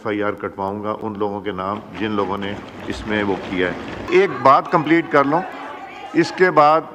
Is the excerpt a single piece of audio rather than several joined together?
yes; 0 cuts

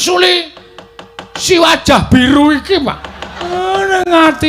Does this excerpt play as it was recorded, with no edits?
no; 1 cut; at 3.5 s

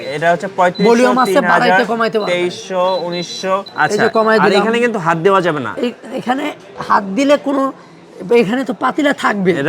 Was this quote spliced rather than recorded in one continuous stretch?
yes; 1 cut; at 3.7 s

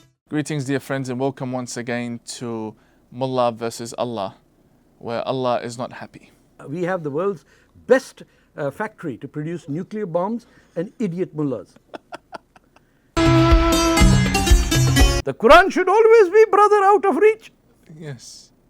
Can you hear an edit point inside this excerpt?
yes; 3 cuts; at 6.7 s, 13.2 s, 15.2 s

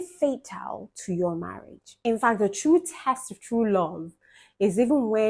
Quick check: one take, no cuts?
no; 1 cut; at 2.0 s

